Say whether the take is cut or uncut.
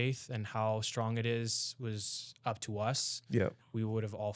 uncut